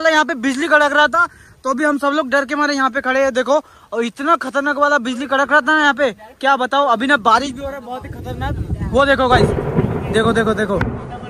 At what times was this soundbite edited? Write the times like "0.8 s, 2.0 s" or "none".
none